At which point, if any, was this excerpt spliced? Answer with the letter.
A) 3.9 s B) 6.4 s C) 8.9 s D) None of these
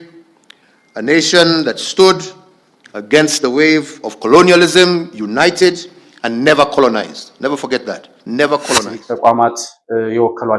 C